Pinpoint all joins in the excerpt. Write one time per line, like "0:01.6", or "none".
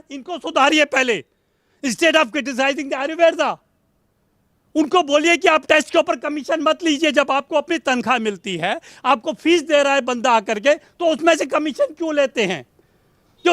none